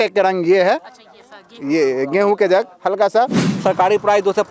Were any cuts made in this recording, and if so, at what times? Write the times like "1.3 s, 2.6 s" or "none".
3.4 s